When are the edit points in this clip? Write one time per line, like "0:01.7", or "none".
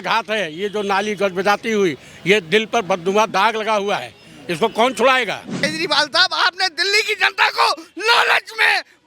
0:05.6